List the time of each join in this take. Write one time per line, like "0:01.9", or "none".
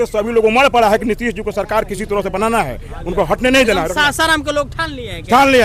none